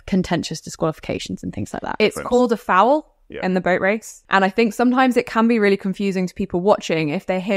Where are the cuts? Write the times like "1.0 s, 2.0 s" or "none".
1.9 s, 4.1 s